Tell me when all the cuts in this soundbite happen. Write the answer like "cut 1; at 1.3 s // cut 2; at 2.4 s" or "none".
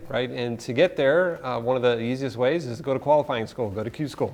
none